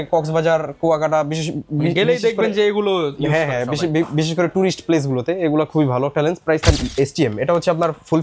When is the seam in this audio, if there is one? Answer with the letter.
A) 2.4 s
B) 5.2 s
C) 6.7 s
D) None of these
C